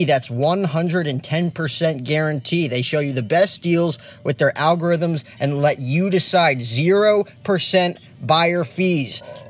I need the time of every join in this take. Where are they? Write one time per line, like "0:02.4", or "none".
none